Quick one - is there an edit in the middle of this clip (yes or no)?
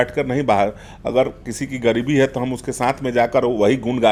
no